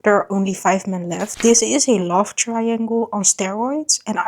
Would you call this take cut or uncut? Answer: cut